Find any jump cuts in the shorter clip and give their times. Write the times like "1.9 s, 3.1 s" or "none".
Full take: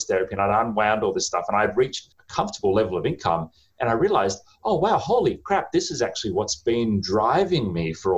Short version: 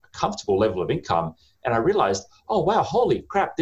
none